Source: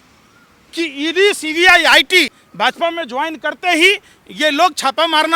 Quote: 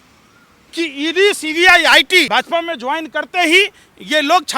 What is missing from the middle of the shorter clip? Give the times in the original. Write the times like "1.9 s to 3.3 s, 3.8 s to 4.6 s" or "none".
2.3 s to 2.6 s